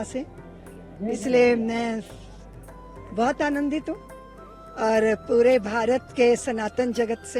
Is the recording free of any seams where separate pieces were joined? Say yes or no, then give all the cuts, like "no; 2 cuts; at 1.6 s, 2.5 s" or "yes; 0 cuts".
yes; 0 cuts